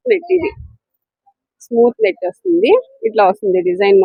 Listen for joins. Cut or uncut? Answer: uncut